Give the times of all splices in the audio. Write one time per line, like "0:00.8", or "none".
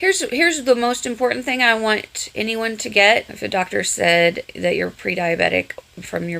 0:03.3